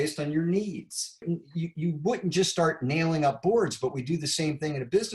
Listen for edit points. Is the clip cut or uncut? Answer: cut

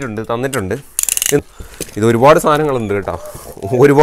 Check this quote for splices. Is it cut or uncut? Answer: cut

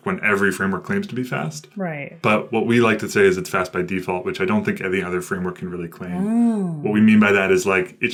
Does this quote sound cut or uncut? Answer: uncut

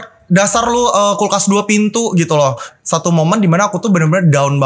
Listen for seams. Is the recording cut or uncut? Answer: cut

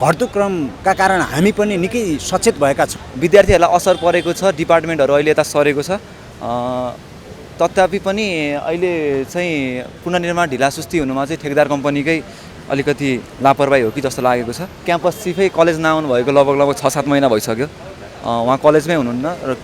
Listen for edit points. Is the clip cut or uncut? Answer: cut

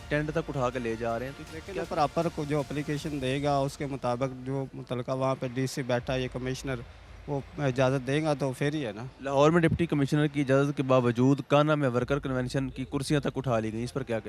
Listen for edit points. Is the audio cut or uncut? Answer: uncut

